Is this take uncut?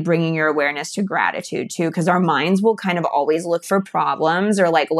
yes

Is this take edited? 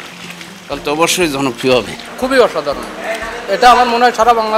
yes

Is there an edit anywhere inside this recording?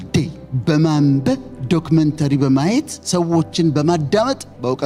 no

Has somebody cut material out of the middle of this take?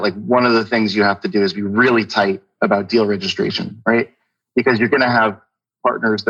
no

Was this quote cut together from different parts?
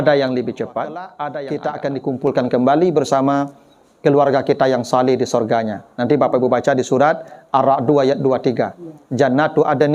yes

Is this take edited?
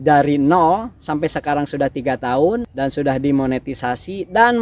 yes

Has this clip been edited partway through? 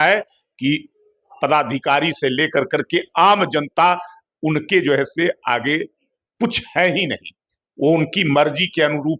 no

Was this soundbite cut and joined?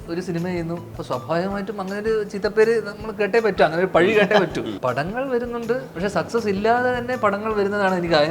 yes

